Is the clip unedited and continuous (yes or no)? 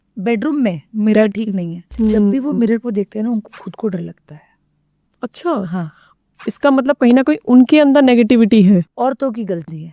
no